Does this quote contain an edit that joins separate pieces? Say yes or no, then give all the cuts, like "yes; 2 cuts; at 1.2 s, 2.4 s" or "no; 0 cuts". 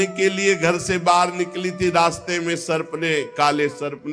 no; 0 cuts